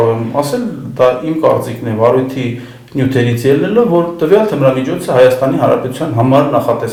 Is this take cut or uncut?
uncut